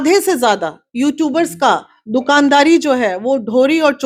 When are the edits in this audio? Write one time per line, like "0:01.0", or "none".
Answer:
none

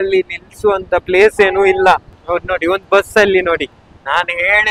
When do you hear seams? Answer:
0:02.1

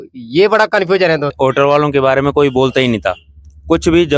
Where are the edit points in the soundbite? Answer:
0:01.3

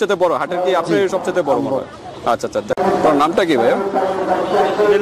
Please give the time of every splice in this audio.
none

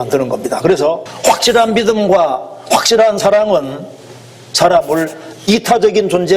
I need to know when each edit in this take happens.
0:01.1

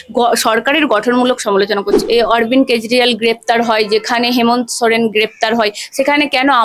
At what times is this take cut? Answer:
0:02.0

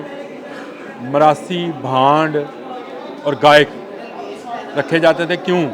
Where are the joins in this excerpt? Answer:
none

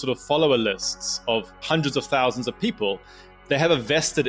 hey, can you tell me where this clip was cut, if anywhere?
0:01.6
0:03.3

